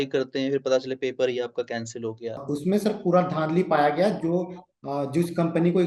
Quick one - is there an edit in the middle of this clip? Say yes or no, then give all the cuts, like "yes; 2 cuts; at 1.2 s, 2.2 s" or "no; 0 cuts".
yes; 1 cut; at 2.4 s